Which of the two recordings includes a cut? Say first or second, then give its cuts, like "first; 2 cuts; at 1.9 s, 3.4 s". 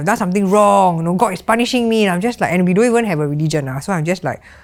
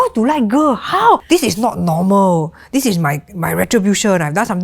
second; 1 cut; at 1.2 s